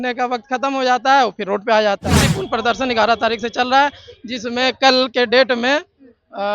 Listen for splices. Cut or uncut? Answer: cut